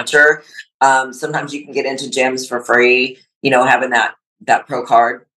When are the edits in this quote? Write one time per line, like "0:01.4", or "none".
none